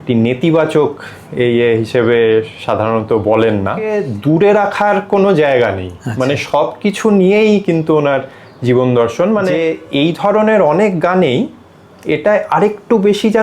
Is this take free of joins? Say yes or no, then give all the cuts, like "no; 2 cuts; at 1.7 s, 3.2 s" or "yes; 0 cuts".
no; 2 cuts; at 4.1 s, 9.6 s